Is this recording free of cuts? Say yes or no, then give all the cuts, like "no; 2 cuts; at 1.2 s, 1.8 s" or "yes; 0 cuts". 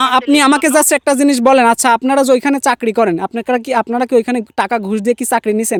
yes; 0 cuts